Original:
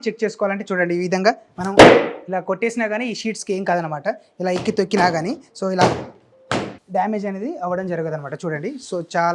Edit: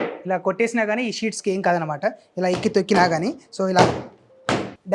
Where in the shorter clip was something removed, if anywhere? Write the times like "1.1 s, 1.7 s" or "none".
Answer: none